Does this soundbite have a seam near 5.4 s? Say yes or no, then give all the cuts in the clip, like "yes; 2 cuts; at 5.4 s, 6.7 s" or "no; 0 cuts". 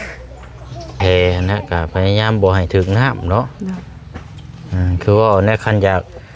no; 1 cut; at 0.9 s